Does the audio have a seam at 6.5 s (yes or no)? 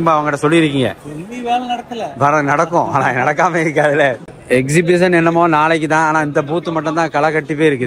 no